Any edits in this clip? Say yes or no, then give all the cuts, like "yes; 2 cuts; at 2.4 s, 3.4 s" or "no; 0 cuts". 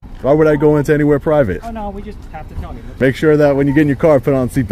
yes; 1 cut; at 2.8 s